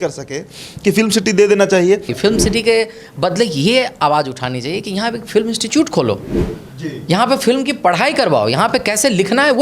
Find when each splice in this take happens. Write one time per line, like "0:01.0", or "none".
0:02.1